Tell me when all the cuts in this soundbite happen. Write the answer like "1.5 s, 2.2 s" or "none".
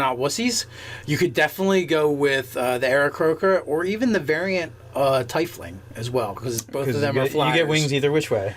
6.7 s